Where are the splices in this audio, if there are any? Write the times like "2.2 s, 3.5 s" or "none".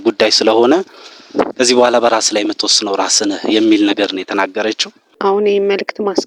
5.0 s

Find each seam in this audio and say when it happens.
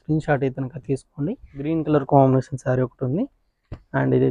1.5 s

